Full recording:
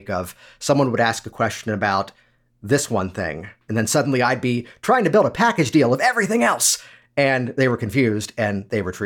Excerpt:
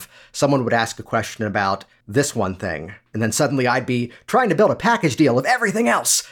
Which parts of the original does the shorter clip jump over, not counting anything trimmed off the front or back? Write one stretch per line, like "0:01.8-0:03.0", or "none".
0:02.2-0:02.5